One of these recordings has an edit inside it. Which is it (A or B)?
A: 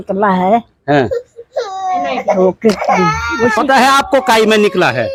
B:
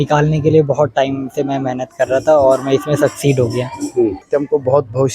B